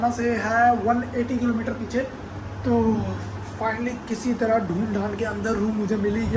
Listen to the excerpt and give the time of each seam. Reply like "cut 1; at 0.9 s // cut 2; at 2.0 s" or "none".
none